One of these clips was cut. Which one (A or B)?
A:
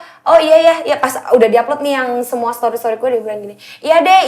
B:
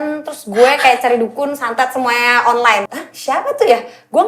B